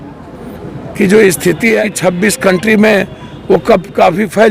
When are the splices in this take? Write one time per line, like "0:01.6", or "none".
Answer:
0:01.9